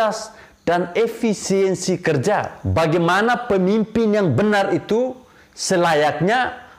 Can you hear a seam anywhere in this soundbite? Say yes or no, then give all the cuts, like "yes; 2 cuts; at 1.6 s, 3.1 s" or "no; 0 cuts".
yes; 1 cut; at 2.6 s